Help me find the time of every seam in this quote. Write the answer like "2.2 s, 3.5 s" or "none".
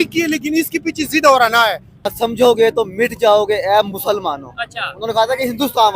2.1 s